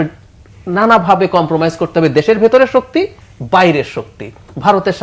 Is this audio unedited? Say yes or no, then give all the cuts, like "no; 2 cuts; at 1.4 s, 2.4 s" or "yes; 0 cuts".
no; 1 cut; at 3.2 s